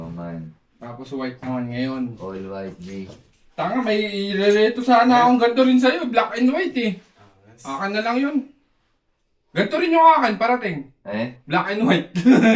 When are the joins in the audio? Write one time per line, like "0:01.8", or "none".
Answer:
none